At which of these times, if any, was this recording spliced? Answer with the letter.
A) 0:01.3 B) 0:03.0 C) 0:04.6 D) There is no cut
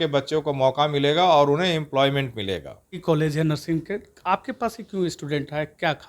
B